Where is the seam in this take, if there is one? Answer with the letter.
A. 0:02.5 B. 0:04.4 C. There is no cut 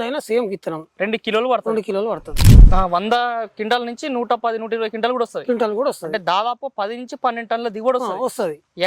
A